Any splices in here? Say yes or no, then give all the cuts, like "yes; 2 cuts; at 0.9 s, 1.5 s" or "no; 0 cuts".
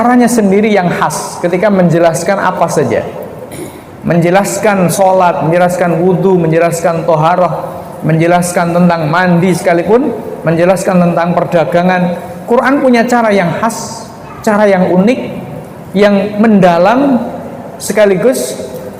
no; 0 cuts